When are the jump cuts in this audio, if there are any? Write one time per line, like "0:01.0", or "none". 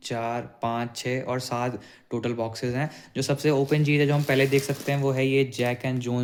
none